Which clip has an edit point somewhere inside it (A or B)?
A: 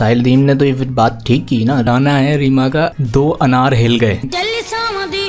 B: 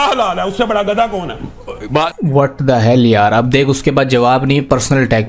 A